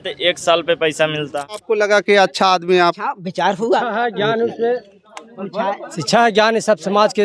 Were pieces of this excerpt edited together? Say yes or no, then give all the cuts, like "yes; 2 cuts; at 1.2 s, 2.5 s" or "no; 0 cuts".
yes; 1 cut; at 1.6 s